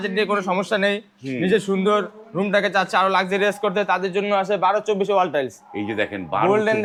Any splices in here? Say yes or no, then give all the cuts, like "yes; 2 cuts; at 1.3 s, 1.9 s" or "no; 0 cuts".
no; 0 cuts